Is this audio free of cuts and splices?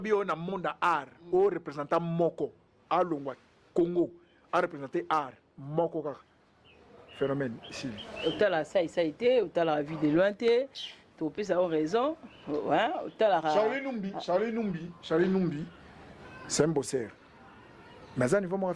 yes; 0 cuts

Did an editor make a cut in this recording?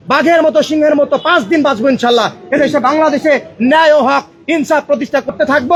no; 0 cuts

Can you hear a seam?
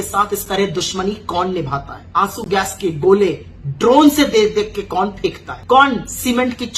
yes; 2 cuts; at 2.0 s, 5.5 s

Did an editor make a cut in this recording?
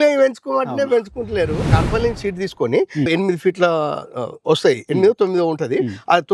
yes; 1 cut; at 1.7 s

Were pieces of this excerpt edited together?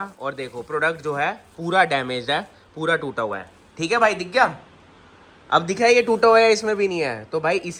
no; 0 cuts

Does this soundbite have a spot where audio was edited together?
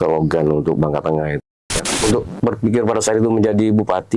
yes; 1 cut; at 1.4 s

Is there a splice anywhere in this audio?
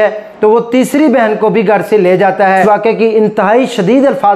yes; 1 cut; at 2.6 s

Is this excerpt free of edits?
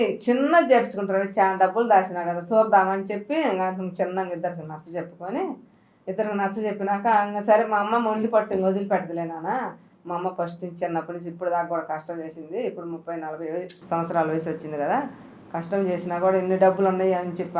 yes; 0 cuts

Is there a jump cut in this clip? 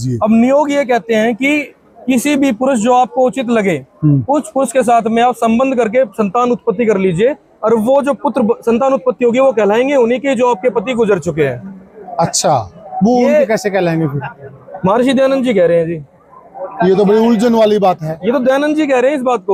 no; 0 cuts

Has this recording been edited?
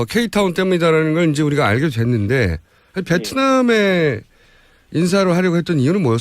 yes; 1 cut; at 2.1 s

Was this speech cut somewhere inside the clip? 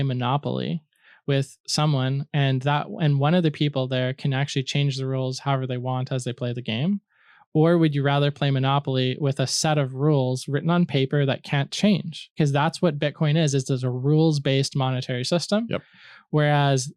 no; 0 cuts

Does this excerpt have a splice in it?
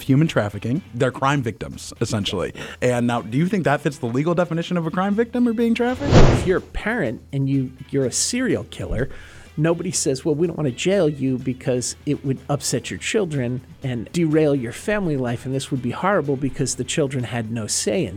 yes; 3 cuts; at 0.9 s, 6.0 s, 14.1 s

